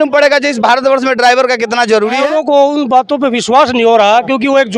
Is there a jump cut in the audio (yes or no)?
yes